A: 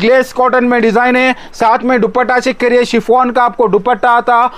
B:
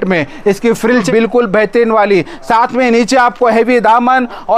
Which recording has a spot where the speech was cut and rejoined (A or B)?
B